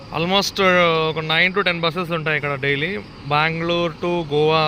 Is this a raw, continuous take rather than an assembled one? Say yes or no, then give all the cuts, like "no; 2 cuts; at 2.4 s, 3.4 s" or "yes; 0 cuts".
yes; 0 cuts